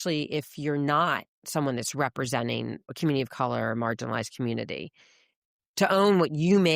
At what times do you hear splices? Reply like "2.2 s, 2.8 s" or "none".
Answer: 2.9 s